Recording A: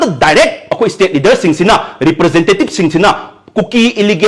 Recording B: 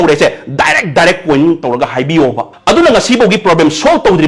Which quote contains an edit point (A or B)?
B